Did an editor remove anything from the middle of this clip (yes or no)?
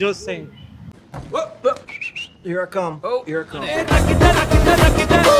no